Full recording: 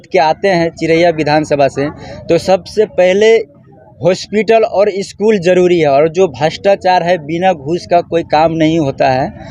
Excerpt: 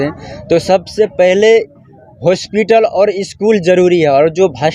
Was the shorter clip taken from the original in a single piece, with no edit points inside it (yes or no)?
yes